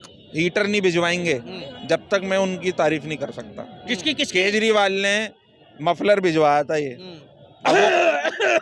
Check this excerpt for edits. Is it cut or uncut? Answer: uncut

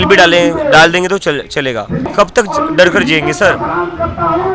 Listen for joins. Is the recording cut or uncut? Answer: cut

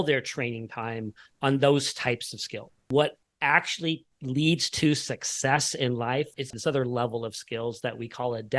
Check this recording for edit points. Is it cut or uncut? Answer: cut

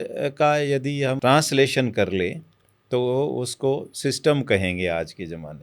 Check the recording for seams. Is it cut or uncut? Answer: cut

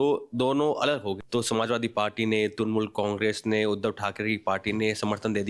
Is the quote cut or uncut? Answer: cut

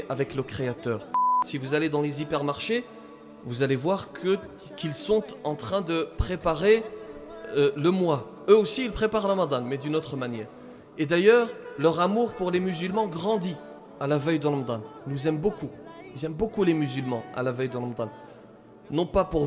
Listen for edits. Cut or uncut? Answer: cut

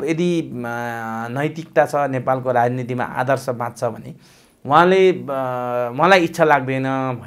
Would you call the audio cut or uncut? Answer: uncut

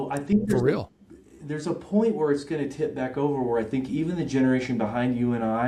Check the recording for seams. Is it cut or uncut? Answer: uncut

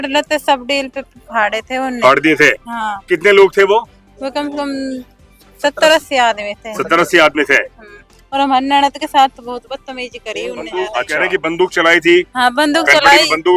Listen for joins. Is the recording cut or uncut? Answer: cut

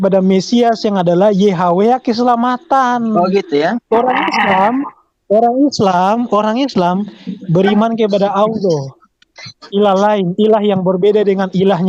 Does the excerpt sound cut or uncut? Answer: uncut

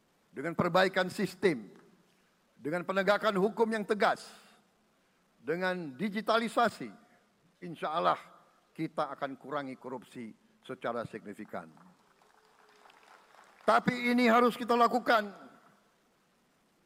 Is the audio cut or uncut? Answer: uncut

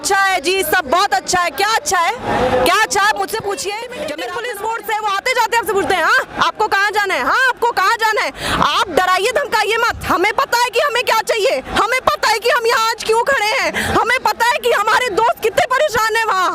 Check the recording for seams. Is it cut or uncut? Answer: cut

